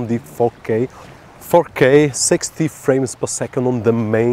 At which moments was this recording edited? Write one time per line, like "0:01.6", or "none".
0:01.3